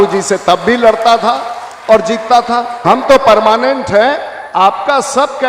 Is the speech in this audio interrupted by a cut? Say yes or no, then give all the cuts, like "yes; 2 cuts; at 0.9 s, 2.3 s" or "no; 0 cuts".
yes; 1 cut; at 2.8 s